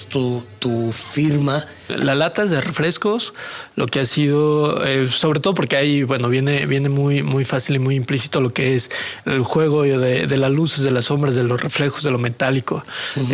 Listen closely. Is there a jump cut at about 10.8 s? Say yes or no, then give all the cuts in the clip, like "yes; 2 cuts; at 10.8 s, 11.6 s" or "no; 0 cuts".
no; 1 cut; at 1.9 s